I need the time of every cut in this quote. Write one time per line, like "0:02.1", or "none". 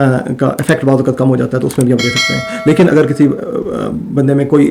none

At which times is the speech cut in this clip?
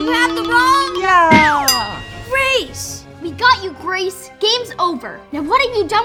none

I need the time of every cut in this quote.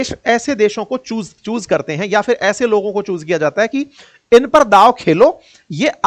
none

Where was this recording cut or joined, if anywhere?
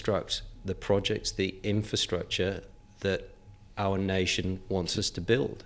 none

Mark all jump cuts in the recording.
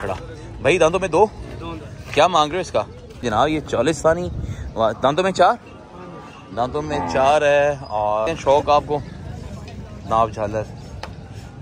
0:03.2
0:08.3

